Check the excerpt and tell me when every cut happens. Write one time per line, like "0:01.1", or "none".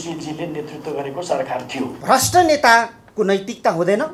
0:02.0